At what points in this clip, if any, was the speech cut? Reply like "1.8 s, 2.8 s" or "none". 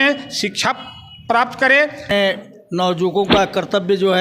2.1 s

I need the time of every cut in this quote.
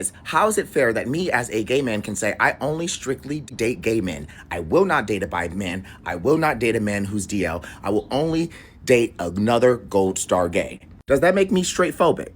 3.5 s, 10.8 s

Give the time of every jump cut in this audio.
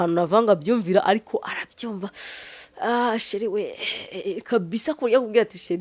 none

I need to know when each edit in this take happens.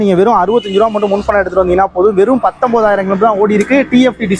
none

